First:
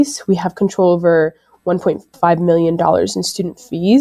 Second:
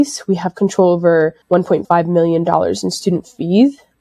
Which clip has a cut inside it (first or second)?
second